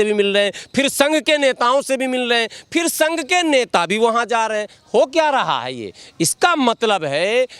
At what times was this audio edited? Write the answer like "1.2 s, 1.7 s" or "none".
none